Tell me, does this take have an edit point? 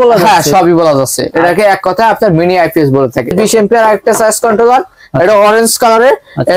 yes; 1 cut; at 3.3 s

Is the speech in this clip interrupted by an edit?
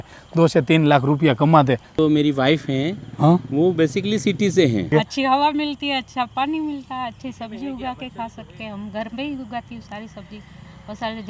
yes; 2 cuts; at 2.0 s, 4.9 s

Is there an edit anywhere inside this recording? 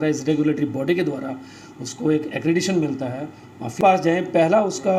yes; 1 cut; at 3.8 s

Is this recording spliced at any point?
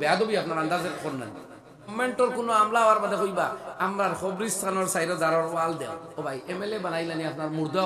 yes; 1 cut; at 1.9 s

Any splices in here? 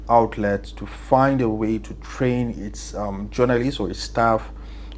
no; 0 cuts

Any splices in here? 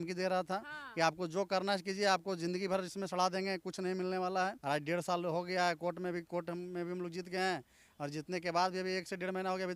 yes; 1 cut; at 4.6 s

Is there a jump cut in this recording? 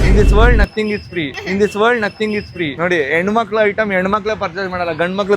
yes; 1 cut; at 2.7 s

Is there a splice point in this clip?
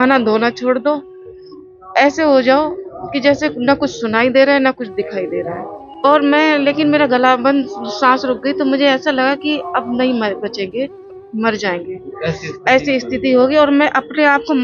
yes; 1 cut; at 6.0 s

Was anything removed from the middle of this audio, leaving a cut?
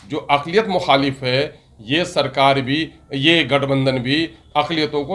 no; 0 cuts

